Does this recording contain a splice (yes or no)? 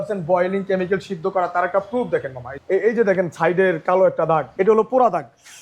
yes